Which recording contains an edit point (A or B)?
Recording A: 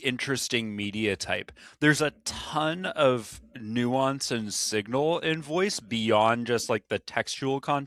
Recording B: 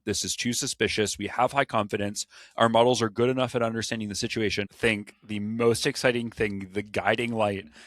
B